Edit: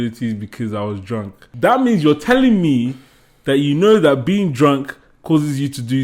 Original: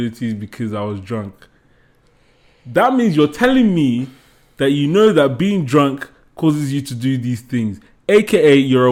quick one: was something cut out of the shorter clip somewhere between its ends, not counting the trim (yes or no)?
yes